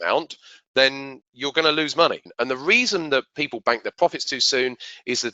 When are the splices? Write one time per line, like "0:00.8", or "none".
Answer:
0:02.3